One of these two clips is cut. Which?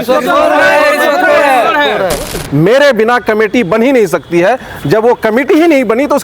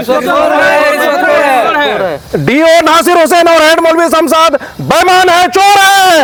first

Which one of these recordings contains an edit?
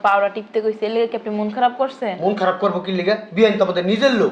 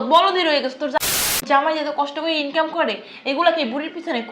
second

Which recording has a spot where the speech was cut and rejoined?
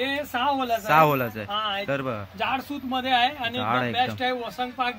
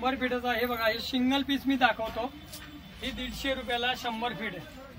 first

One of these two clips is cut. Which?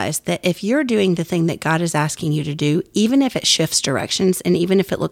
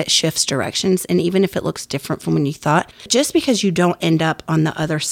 second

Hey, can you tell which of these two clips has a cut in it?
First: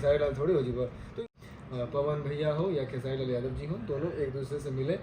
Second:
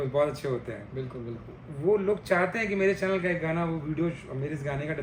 first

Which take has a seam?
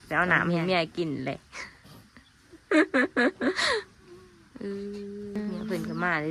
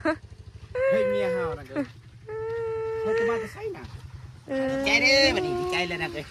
second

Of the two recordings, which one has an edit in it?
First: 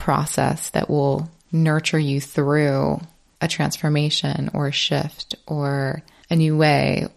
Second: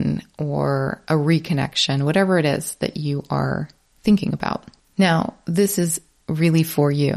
first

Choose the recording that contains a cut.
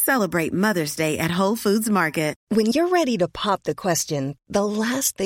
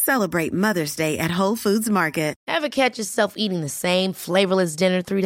second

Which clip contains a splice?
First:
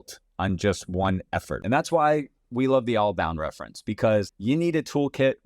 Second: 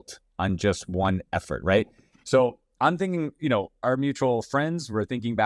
first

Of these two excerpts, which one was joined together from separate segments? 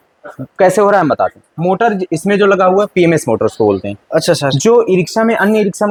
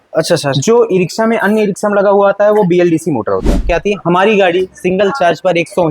second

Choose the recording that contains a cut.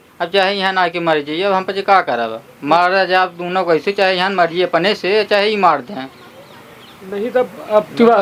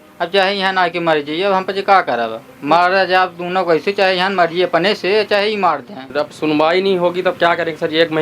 second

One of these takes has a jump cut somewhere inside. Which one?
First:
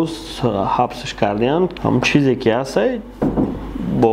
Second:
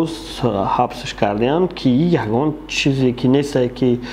first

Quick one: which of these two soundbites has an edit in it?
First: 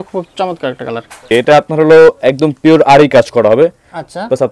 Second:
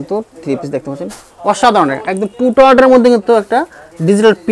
first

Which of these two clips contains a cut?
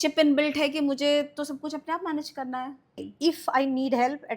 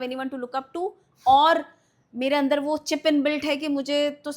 first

